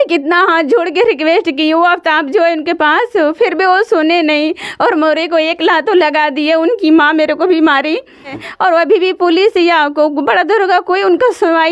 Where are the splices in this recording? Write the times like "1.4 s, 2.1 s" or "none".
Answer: 8.4 s